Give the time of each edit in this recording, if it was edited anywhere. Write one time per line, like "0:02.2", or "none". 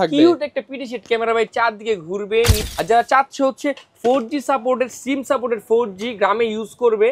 0:02.6